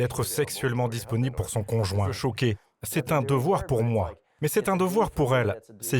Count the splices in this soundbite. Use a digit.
1